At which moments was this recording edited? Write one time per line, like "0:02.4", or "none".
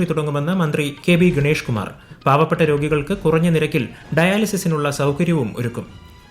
0:00.9